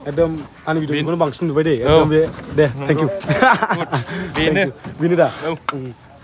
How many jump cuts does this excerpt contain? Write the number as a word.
zero